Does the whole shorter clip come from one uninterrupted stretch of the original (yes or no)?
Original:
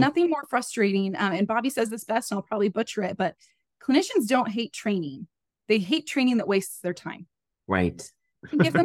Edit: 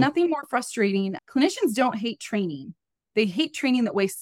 no